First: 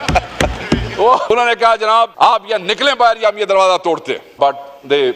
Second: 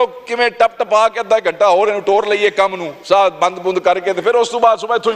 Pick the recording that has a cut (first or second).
first